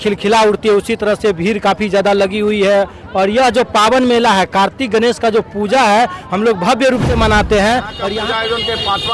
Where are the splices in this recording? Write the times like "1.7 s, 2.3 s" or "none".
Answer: 8.0 s